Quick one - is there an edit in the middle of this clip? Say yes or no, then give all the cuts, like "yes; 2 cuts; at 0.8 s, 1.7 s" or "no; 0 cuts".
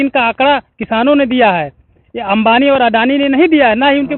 no; 0 cuts